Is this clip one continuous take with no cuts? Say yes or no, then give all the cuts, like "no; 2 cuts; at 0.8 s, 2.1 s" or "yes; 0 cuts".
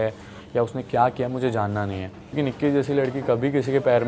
no; 1 cut; at 2.2 s